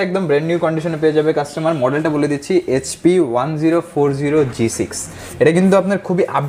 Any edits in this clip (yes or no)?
no